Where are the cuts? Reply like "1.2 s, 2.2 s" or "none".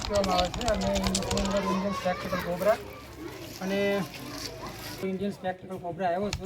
5.0 s